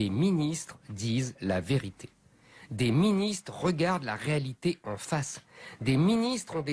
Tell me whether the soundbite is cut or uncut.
cut